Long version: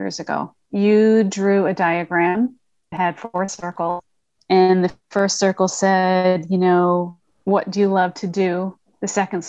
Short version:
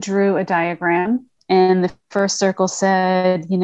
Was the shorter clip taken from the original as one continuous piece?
no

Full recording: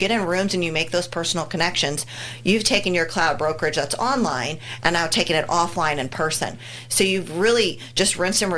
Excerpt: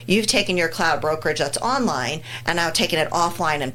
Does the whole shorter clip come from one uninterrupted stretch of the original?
yes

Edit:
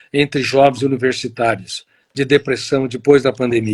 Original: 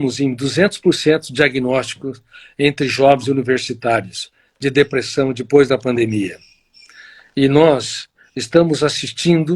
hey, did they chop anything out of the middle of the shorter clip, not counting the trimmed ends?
no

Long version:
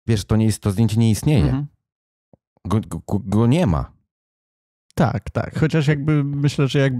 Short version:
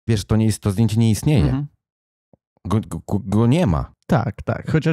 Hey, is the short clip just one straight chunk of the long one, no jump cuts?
no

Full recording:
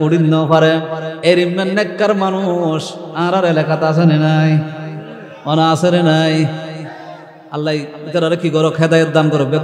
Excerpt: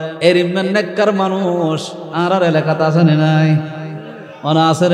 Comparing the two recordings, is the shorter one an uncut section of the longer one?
yes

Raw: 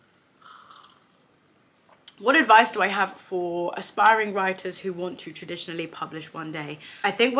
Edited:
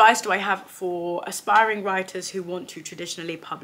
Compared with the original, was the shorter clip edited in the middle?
no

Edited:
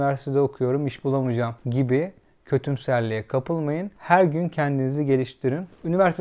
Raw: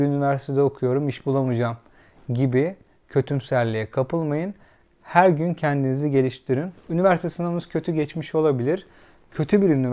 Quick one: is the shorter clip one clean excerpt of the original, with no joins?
no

